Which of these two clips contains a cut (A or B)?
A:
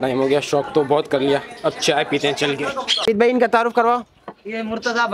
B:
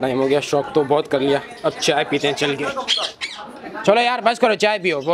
A